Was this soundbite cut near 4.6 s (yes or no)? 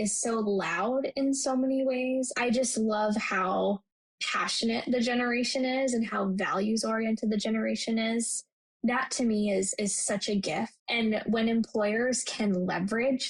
no